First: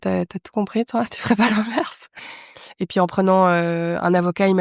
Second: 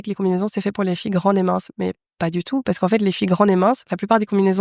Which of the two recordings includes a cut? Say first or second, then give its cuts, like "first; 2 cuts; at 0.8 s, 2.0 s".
first; 1 cut; at 2.3 s